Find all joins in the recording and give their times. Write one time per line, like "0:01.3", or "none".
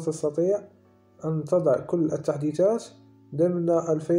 none